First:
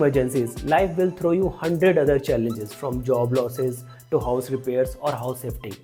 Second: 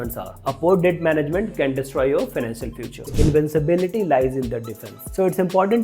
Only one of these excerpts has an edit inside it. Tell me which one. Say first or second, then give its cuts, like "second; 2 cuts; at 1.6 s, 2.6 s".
second; 1 cut; at 3.1 s